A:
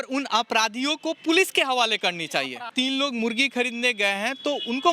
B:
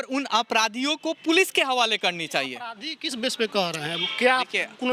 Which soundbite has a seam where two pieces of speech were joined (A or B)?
A